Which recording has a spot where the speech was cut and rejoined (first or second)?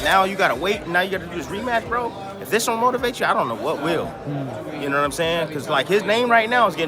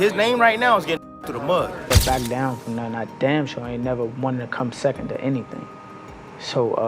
second